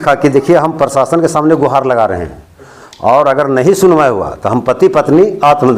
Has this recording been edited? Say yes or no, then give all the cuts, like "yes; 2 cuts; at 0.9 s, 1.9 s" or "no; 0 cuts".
no; 0 cuts